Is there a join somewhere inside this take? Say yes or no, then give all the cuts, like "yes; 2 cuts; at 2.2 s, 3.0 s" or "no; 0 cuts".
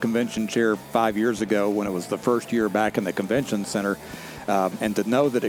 no; 0 cuts